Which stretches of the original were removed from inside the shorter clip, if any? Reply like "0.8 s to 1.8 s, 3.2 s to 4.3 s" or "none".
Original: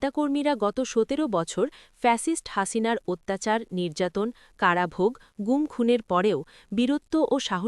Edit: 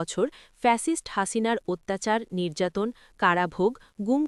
none